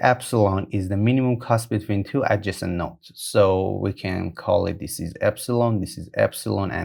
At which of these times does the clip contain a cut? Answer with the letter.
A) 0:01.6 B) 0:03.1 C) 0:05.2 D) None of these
D